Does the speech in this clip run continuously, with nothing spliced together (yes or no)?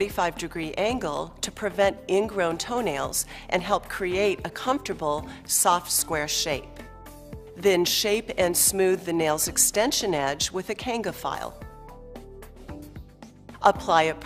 yes